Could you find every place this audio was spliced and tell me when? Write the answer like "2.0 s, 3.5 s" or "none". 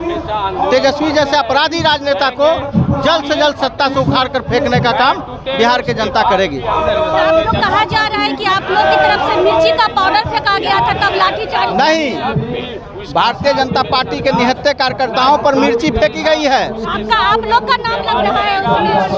none